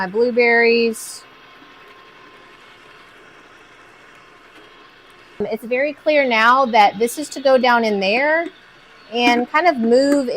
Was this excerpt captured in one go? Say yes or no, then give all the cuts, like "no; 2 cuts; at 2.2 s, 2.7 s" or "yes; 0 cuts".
no; 1 cut; at 5.4 s